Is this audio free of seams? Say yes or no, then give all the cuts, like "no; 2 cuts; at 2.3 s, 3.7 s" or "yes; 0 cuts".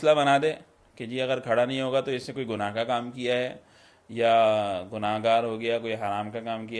yes; 0 cuts